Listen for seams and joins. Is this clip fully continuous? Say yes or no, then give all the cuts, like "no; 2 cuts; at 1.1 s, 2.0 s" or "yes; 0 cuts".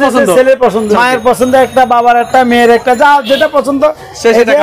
no; 1 cut; at 0.9 s